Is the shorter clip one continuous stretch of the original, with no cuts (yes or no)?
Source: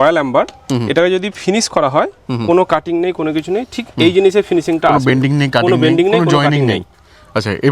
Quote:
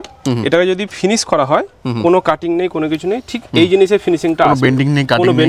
yes